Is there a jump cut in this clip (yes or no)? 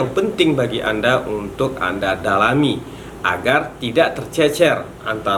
no